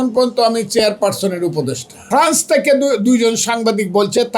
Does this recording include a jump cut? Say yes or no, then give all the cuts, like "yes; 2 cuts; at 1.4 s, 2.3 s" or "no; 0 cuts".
yes; 1 cut; at 2.2 s